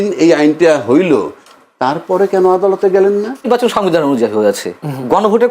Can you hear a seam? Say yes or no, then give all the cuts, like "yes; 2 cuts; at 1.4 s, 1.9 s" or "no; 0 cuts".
yes; 1 cut; at 3.5 s